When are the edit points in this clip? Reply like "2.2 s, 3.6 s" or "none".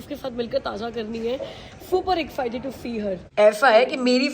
3.2 s